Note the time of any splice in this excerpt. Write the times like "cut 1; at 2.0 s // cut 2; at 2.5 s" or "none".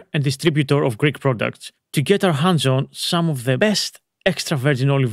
cut 1; at 3.6 s